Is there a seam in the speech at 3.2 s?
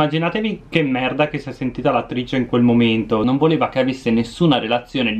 yes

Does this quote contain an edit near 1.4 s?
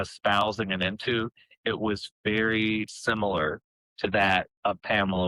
no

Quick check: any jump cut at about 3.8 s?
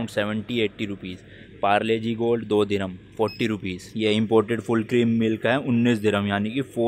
yes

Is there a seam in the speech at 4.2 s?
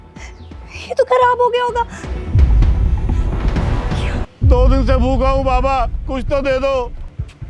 yes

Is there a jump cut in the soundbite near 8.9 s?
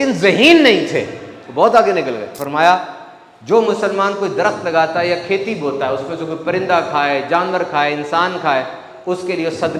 no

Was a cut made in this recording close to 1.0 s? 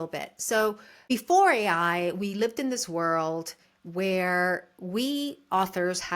yes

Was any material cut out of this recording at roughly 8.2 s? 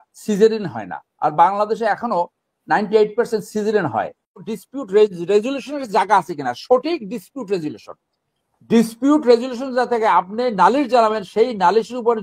no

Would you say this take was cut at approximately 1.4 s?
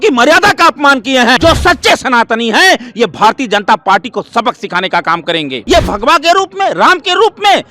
yes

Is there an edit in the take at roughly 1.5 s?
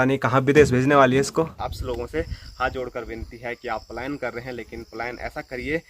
yes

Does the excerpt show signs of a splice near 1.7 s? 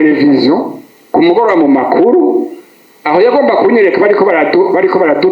no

